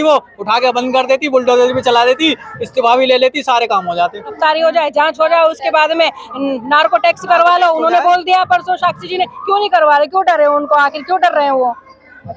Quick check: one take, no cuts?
no; 1 cut; at 4.4 s

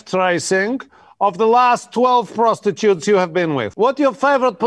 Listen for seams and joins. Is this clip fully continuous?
no; 1 cut; at 3.7 s

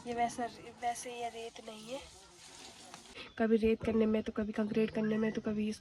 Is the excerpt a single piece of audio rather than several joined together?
no; 1 cut; at 3.1 s

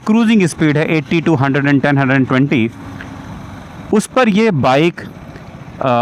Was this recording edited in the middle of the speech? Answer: no; 0 cuts

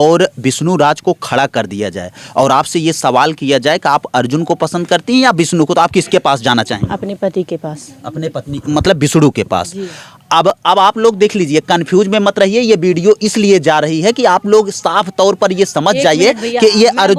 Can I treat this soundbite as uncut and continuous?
yes; 0 cuts

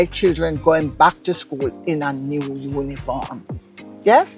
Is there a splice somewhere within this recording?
no; 0 cuts

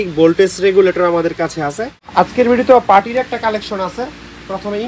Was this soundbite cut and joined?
yes; 1 cut; at 2.1 s

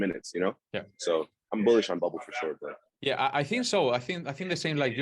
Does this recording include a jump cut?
no; 0 cuts

